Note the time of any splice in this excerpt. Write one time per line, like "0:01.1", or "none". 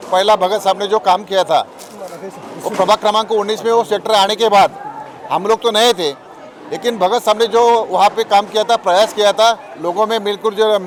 none